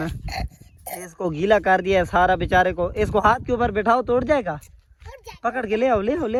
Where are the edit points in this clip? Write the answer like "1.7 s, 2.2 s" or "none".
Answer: none